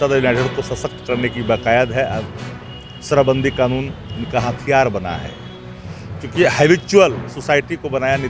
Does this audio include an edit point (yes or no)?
no